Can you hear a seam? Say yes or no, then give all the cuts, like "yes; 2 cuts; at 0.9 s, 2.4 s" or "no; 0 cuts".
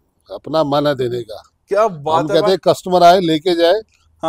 no; 0 cuts